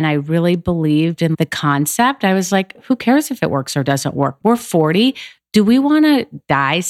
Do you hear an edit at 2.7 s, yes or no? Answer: no